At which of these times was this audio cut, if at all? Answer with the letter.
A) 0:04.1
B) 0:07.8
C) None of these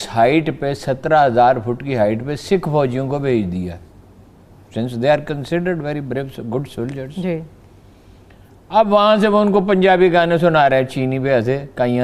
C